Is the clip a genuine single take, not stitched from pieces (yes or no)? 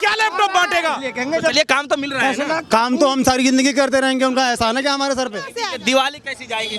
no